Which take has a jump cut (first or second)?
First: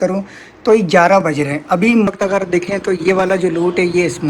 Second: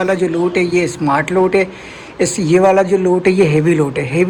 first